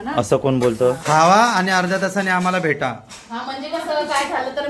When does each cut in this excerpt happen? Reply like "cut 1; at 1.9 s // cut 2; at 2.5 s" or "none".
cut 1; at 1.0 s